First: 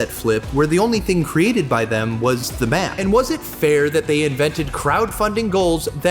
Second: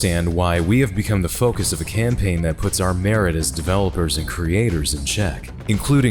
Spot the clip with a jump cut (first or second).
first